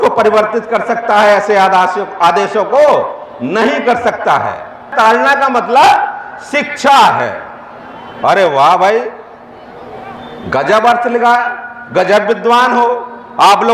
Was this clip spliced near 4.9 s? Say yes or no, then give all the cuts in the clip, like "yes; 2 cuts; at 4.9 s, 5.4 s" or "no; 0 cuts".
yes; 1 cut; at 4.9 s